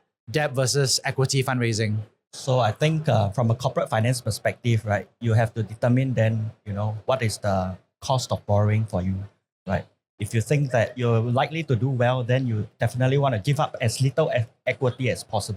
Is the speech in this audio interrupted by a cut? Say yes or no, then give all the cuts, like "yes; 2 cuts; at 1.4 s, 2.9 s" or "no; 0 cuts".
no; 0 cuts